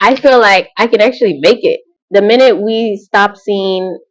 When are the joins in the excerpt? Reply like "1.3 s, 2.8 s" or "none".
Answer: 1.9 s